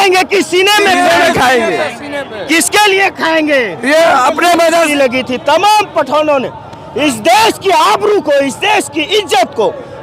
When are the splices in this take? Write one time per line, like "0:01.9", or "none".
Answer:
0:04.9